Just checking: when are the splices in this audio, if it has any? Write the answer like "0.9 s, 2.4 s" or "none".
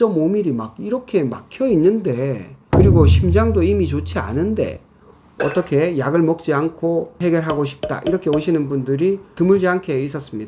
7.1 s, 9.3 s